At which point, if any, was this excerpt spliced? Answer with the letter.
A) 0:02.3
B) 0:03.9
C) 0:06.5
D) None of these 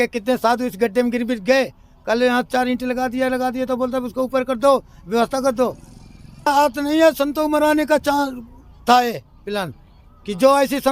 C